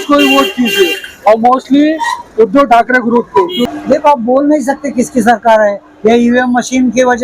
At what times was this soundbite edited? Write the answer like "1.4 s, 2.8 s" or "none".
3.6 s